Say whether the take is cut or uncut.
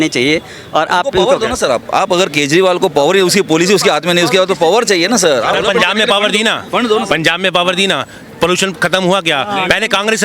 cut